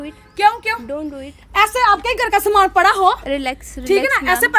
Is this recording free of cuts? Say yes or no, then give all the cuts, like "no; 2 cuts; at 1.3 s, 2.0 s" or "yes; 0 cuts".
yes; 0 cuts